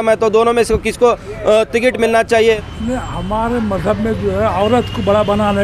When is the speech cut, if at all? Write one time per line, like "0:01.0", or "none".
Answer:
0:02.6